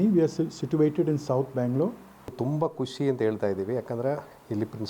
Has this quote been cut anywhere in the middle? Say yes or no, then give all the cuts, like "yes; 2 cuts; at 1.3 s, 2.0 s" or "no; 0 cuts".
yes; 1 cut; at 2.3 s